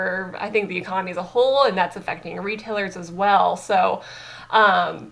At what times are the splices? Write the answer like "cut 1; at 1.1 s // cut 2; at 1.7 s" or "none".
none